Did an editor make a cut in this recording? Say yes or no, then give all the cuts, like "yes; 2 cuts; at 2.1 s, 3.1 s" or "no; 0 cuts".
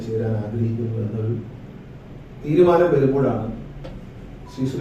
no; 0 cuts